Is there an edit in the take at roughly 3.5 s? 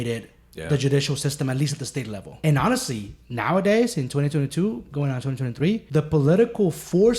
no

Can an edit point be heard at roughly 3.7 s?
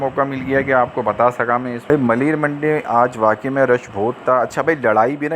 no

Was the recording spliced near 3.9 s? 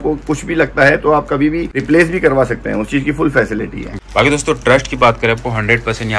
yes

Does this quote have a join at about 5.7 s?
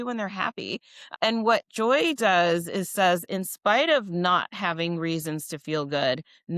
no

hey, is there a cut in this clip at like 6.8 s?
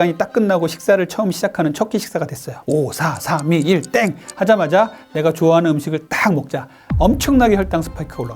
yes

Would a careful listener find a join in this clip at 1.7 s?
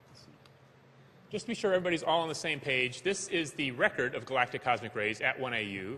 no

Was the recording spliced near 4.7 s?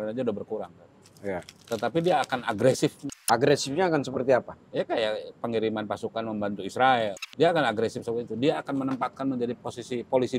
no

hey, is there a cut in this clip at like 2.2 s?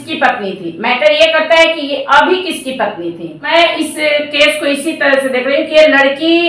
no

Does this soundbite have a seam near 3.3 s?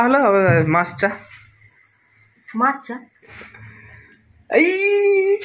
yes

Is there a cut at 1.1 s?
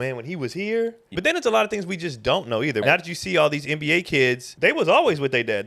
yes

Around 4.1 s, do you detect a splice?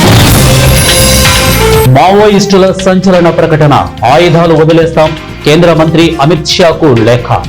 no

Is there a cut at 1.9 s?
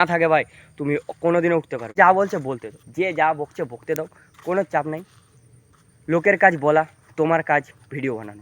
yes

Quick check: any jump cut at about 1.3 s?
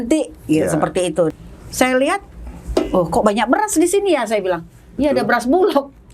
yes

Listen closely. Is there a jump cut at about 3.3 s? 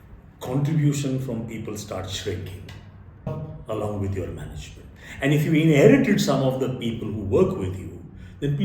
yes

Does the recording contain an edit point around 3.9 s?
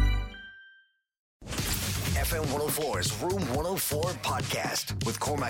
no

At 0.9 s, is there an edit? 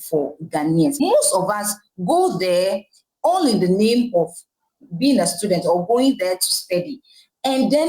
yes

